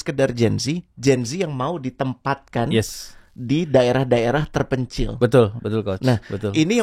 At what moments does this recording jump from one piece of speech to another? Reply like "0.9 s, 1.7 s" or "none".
none